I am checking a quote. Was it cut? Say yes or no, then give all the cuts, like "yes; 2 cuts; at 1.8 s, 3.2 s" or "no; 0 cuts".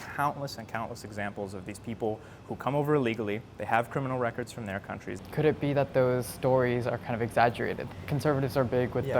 yes; 2 cuts; at 5.1 s, 7.8 s